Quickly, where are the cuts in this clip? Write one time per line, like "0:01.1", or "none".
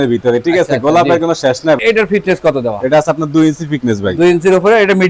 0:01.8